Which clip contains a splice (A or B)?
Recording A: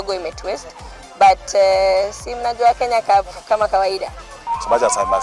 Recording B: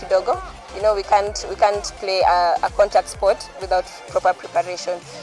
A